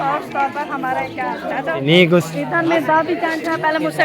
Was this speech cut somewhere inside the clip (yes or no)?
yes